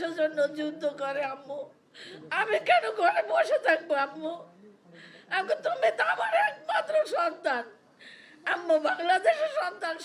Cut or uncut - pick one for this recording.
uncut